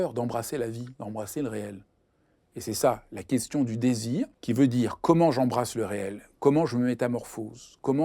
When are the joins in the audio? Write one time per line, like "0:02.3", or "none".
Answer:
0:04.4